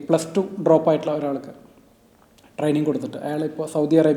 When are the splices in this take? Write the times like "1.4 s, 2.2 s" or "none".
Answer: none